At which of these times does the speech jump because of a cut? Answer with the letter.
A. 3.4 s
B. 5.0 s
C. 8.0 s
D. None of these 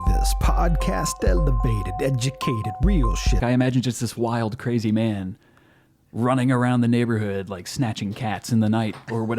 A